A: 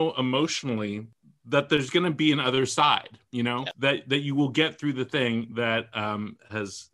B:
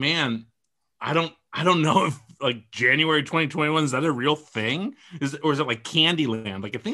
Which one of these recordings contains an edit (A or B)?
A